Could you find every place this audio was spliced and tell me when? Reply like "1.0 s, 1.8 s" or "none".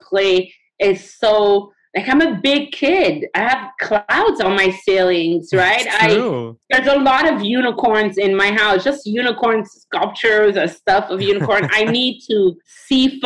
none